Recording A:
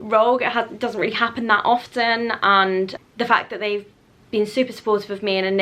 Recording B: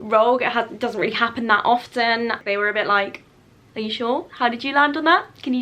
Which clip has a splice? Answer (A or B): B